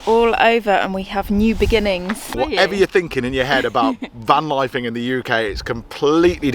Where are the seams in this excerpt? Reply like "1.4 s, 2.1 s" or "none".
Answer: 2.3 s